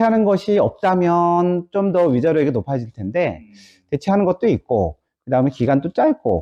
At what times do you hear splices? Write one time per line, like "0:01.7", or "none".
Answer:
none